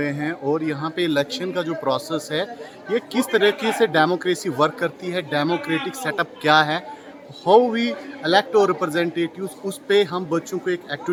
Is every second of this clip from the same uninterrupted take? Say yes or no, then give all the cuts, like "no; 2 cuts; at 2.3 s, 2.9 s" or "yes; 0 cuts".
yes; 0 cuts